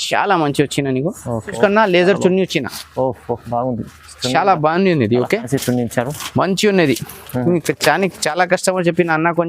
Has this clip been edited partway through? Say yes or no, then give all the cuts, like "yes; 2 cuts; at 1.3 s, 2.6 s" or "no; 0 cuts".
yes; 1 cut; at 1.6 s